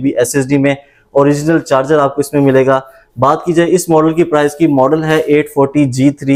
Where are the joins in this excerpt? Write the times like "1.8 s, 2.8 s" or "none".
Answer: none